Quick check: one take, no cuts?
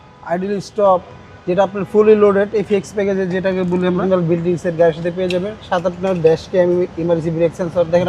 no; 1 cut; at 4.0 s

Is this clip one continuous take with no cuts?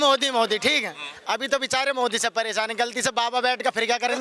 yes; 0 cuts

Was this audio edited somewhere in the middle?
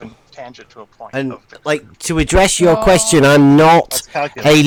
no; 0 cuts

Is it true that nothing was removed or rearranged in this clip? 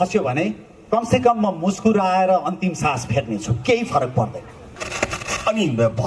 no; 1 cut; at 4.7 s

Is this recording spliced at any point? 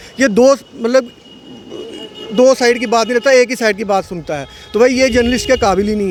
no; 0 cuts

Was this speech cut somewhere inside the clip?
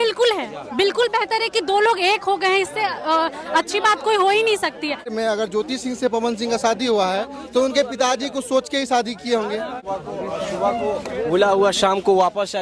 yes; 2 cuts; at 5.1 s, 9.8 s

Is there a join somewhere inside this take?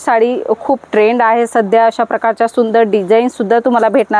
no; 0 cuts

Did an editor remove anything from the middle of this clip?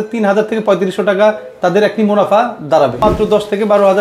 yes; 1 cut; at 3.0 s

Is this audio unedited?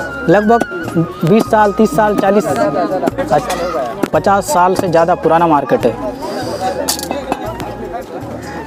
yes; 0 cuts

